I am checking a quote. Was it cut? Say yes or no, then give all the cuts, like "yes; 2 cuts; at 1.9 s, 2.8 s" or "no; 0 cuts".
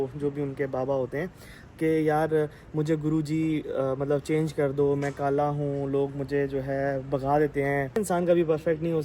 yes; 1 cut; at 8.0 s